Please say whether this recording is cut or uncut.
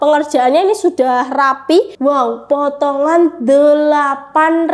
cut